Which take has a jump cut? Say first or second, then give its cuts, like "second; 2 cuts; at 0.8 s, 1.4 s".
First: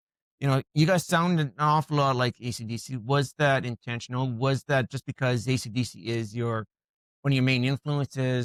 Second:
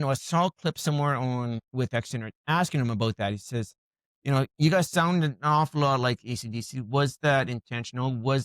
second; 1 cut; at 1.5 s